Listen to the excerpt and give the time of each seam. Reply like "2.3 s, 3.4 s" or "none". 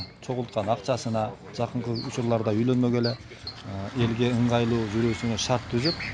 3.6 s